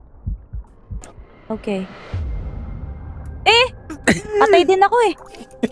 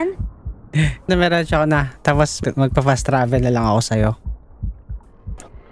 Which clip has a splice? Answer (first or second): second